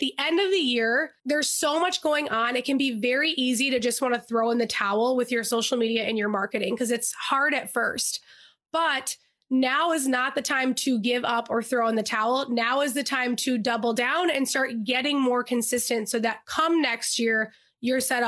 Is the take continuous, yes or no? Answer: no